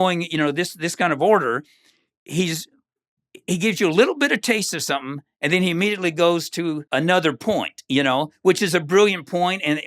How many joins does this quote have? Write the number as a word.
one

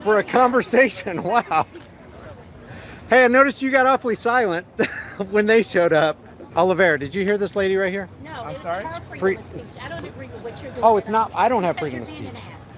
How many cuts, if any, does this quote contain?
one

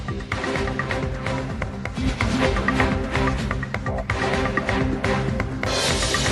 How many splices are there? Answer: one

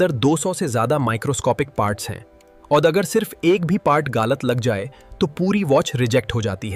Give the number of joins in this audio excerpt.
zero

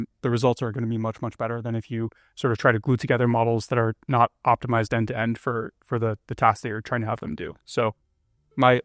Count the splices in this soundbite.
zero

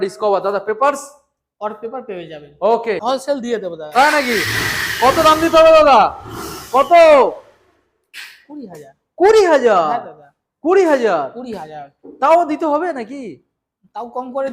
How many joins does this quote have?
one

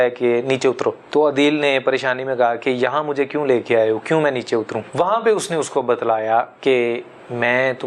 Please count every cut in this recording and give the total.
three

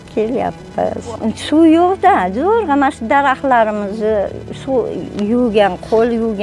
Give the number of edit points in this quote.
one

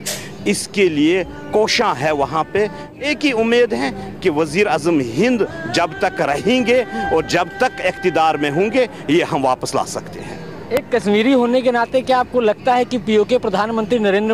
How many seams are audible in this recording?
one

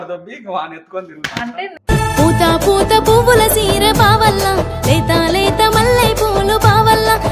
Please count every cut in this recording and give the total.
one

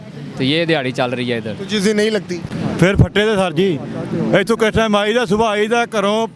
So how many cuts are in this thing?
one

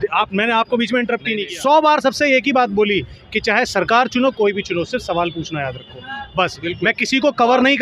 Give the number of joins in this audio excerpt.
one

